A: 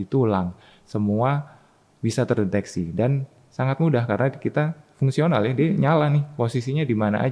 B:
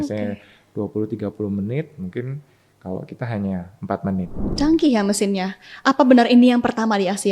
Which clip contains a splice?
B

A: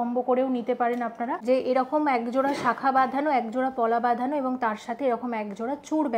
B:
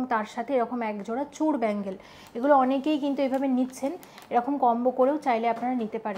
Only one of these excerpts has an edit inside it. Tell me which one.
A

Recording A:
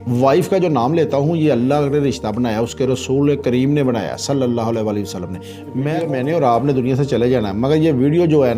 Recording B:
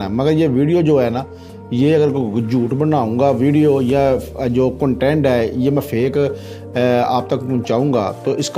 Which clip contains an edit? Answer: A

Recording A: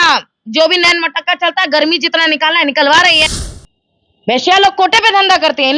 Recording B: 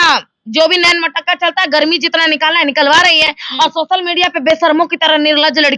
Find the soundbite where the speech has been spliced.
A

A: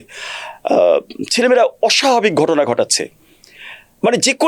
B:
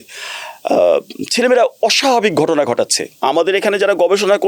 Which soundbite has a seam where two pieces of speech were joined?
B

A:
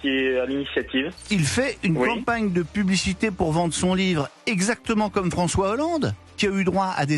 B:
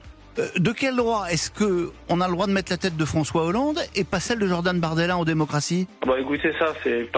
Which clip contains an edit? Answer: A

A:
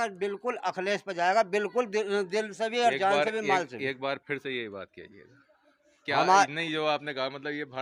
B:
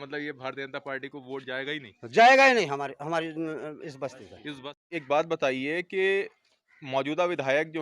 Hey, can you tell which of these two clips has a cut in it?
B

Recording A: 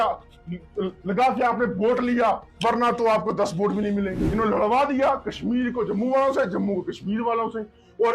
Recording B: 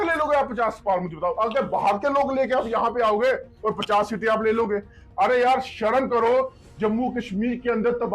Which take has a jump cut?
A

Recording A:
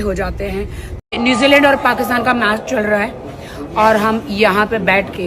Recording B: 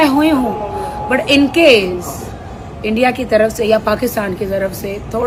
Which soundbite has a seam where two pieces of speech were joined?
A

